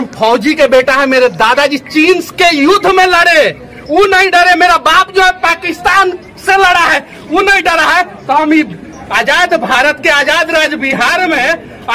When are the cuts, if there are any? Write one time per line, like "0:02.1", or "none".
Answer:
none